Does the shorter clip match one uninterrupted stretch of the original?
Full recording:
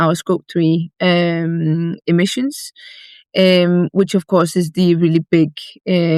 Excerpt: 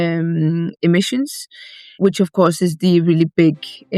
no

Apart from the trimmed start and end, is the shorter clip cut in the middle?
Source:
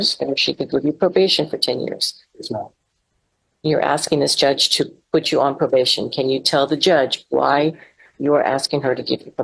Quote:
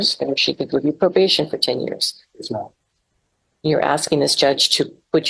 no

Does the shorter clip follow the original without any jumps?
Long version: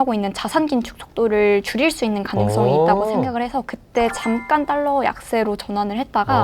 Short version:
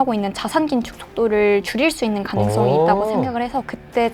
yes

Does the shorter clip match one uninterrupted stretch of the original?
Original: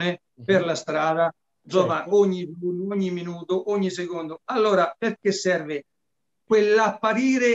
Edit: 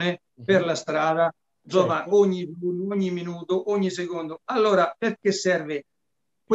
yes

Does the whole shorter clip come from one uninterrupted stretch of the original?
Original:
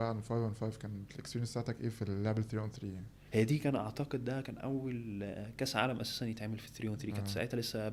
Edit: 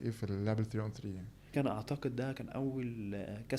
no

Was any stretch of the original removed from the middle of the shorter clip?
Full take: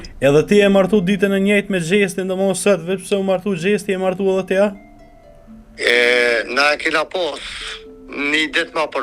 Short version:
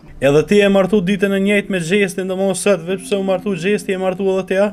no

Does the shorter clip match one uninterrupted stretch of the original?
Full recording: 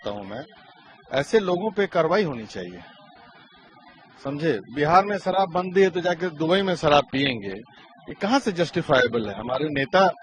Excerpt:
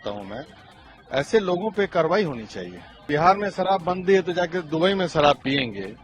no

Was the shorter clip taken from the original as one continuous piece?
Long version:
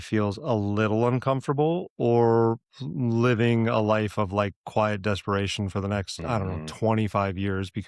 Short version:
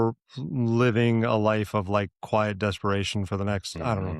yes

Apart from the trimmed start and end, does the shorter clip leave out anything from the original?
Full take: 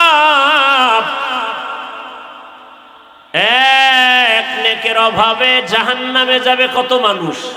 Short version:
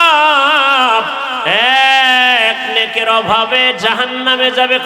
yes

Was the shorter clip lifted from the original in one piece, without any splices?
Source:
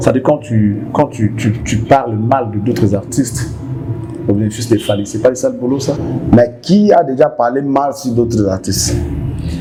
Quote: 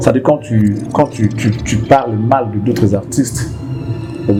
yes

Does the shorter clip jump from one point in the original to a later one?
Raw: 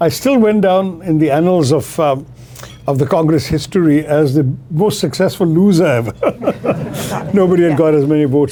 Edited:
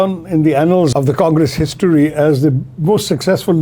yes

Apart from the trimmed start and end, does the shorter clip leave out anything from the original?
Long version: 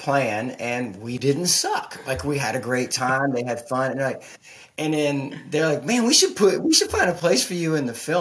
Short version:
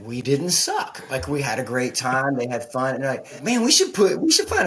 yes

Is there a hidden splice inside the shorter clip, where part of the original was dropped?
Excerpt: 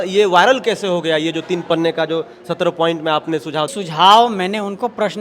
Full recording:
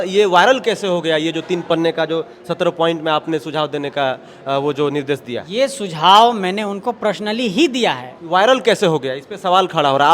yes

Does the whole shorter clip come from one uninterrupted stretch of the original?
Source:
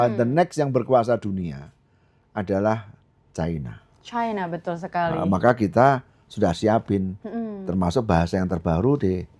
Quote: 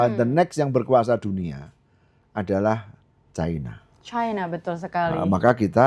yes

